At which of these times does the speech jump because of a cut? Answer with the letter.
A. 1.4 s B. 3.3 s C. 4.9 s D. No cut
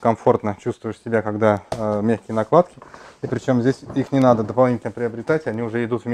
D